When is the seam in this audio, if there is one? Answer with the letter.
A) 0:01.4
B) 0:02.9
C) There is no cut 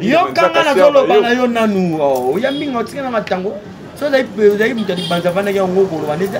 C